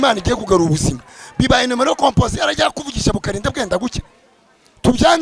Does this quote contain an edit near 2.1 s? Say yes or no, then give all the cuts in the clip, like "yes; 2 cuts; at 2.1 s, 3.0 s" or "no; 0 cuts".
no; 0 cuts